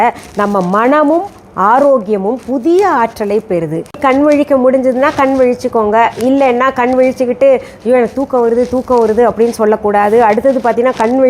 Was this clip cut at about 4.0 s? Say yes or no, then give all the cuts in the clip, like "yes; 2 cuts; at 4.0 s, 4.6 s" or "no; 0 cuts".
yes; 1 cut; at 4.0 s